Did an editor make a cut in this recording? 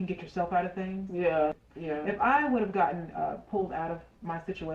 yes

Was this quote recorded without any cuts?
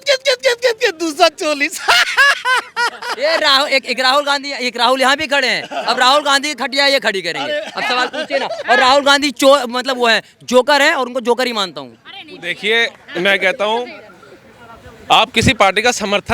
yes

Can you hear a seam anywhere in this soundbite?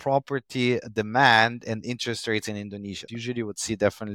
yes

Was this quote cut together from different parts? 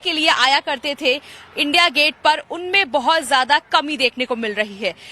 yes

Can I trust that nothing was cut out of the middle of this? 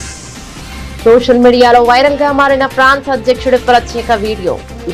yes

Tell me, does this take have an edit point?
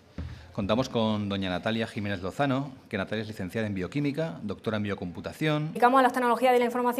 no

